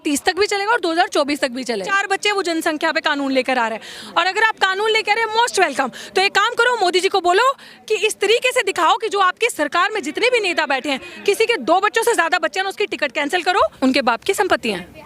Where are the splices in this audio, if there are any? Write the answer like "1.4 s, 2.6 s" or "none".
1.9 s, 13.7 s